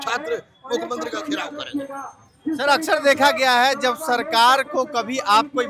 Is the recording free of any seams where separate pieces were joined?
yes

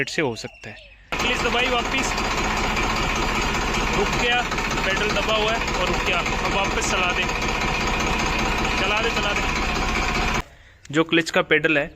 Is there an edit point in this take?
yes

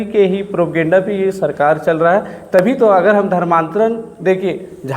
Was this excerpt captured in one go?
yes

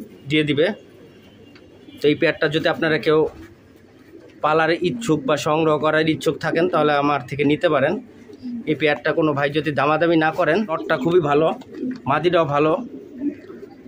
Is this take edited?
yes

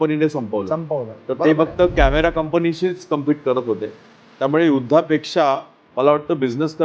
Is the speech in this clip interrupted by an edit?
no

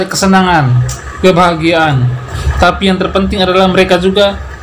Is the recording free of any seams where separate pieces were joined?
no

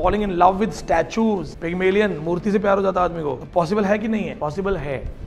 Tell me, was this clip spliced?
yes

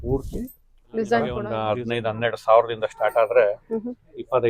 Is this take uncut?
no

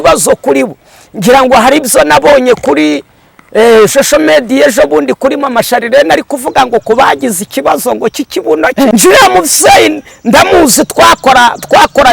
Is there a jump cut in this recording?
yes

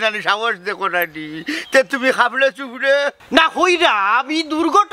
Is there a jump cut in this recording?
yes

